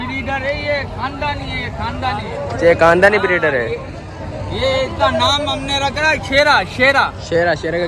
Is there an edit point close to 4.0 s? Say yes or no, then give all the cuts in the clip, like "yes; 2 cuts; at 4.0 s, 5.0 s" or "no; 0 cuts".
no; 0 cuts